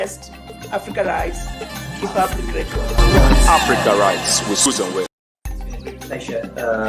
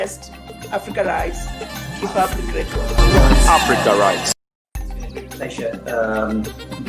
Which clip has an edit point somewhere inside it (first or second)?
second